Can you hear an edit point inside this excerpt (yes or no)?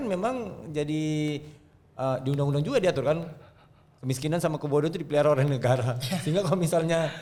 no